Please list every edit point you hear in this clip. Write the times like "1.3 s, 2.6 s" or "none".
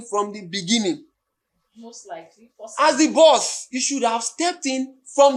none